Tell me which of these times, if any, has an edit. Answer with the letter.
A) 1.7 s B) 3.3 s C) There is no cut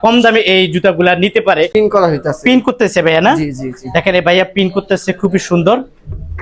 A